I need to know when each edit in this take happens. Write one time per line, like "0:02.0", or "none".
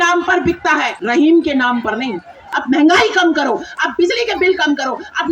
0:00.9
0:02.5

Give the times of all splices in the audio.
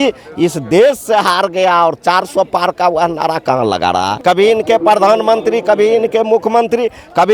0:04.1

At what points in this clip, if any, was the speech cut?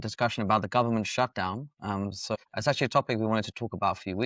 0:02.4

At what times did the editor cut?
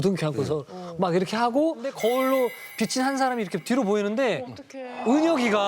0:01.9

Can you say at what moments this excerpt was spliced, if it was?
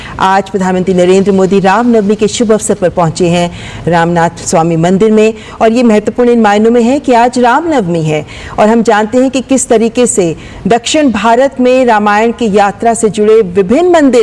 none

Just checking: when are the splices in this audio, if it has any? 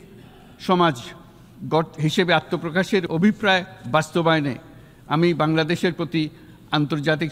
0:03.1

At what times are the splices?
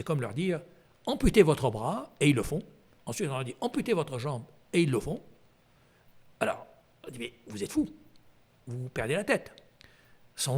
none

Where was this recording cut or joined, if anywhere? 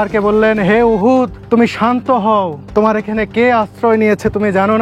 0:01.4
0:02.6

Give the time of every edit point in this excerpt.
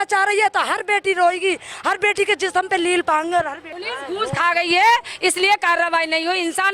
0:03.6

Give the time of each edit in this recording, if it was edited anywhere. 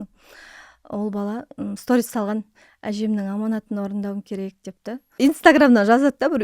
0:05.2

